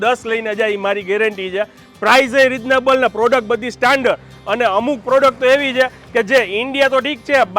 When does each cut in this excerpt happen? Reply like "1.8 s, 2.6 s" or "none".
1.8 s